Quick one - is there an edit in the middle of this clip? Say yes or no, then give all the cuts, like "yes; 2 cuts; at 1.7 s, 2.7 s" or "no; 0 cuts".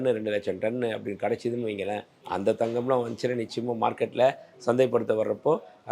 yes; 1 cut; at 2.1 s